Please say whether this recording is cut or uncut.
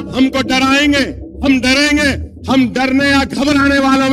cut